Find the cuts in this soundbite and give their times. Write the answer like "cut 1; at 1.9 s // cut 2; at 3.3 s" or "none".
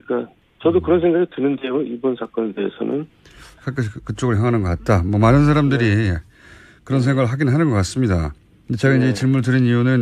cut 1; at 6.9 s